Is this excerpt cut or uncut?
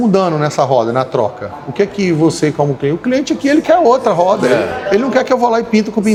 uncut